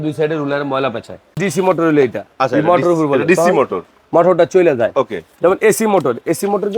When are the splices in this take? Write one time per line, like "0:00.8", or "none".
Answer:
0:01.4